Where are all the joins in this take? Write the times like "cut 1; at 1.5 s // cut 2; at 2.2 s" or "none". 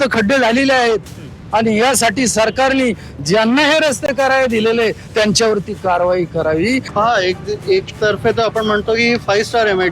cut 1; at 6.9 s